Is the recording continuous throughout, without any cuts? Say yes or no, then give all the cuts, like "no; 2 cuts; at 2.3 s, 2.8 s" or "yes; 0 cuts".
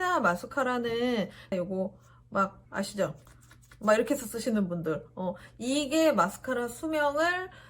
yes; 0 cuts